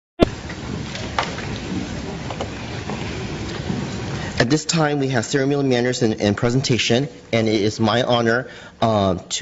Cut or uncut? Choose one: cut